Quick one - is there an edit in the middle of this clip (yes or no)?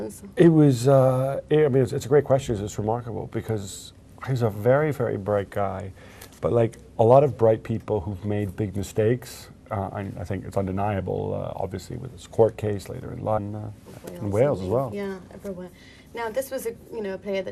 no